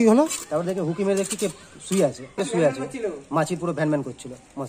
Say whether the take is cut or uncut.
cut